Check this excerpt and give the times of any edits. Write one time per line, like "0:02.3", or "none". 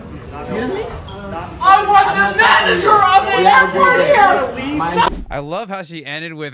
0:05.2